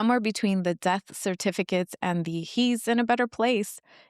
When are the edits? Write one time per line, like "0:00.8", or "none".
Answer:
none